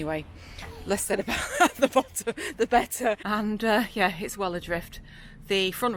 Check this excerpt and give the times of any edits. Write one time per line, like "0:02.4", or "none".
0:03.2